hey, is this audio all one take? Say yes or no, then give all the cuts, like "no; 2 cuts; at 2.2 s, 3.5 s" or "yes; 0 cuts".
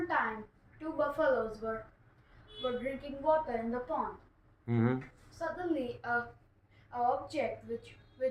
yes; 0 cuts